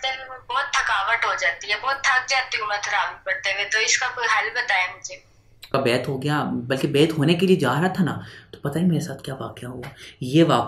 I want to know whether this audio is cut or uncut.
cut